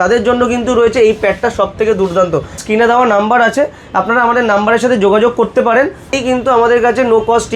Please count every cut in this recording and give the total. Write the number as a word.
two